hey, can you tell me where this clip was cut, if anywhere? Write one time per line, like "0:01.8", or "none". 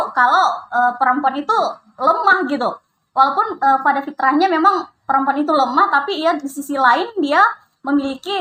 none